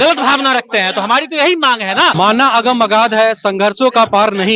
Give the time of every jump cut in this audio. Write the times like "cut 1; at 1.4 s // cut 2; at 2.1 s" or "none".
cut 1; at 2.1 s